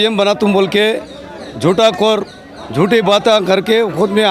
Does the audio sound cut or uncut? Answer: uncut